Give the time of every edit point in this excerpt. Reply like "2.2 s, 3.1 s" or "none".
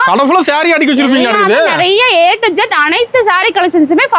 none